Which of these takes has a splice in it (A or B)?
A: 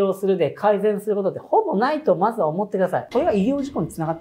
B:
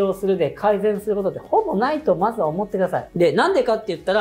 A